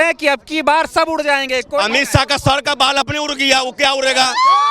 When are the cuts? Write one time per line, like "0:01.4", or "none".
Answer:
none

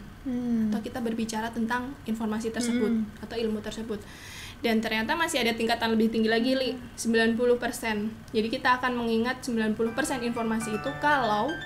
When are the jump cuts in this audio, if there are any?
none

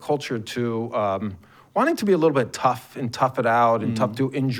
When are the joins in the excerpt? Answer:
none

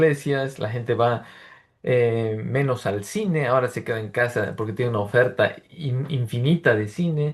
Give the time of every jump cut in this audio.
none

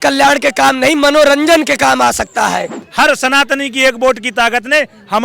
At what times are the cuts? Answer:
0:02.8

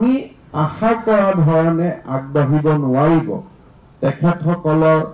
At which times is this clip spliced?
none

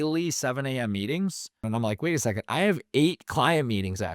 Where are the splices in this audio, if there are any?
0:01.7

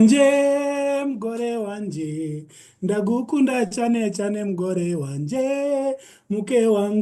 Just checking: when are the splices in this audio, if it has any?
none

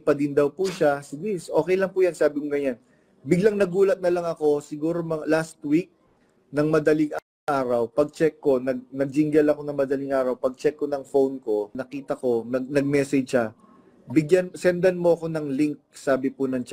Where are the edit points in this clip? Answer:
0:11.9

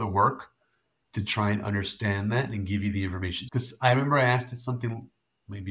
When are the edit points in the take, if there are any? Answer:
0:03.4

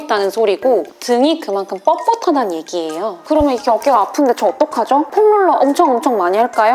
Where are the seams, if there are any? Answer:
0:03.1

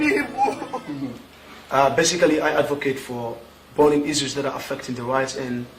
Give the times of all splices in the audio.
0:00.9

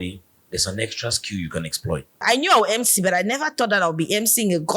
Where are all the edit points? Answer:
0:02.2

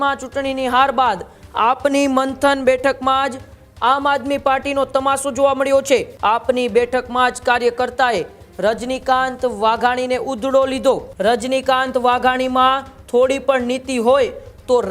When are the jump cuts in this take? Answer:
0:06.1
0:11.1

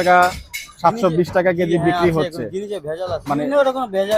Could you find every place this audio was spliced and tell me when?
0:03.2

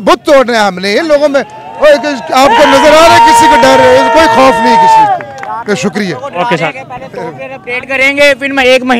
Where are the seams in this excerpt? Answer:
none

